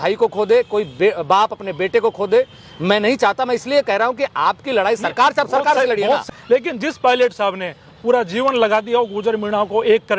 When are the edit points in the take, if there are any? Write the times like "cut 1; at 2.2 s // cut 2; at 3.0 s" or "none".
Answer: cut 1; at 6.2 s